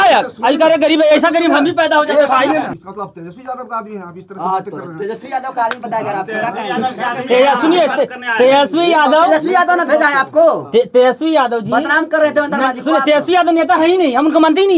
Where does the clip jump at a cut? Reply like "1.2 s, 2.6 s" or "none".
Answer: 2.8 s